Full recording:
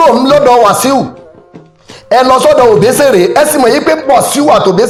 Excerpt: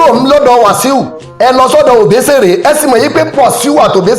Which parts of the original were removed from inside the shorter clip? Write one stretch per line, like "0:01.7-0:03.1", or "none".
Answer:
0:01.2-0:01.9